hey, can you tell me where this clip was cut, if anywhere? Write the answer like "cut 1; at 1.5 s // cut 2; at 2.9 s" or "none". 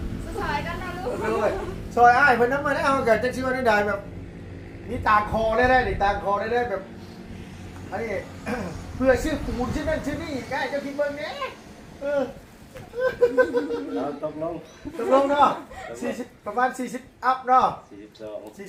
none